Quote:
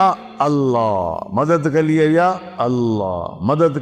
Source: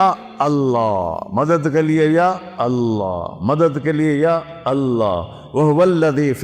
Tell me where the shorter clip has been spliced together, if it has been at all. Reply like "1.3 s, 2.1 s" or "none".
none